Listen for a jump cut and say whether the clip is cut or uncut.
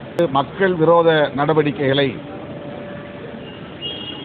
uncut